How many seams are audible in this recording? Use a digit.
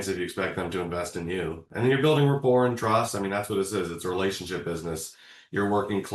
1